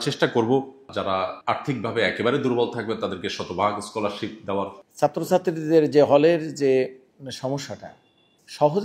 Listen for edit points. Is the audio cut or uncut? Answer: cut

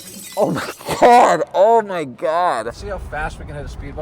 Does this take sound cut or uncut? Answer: cut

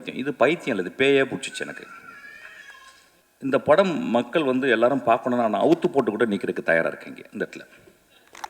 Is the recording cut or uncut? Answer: cut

